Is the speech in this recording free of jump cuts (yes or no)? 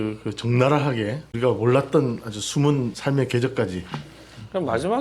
no